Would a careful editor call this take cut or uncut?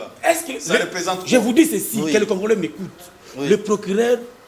uncut